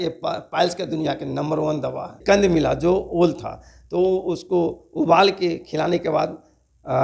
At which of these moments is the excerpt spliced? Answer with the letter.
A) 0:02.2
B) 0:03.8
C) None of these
A